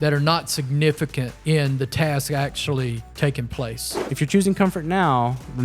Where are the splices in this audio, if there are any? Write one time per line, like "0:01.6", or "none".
0:01.3
0:03.0
0:04.1